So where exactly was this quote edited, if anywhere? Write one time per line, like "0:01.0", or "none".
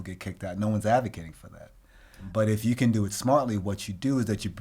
0:02.3